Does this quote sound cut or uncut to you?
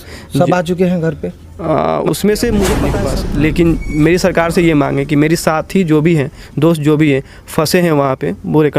cut